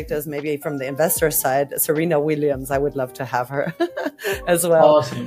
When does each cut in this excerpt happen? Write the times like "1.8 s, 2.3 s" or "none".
none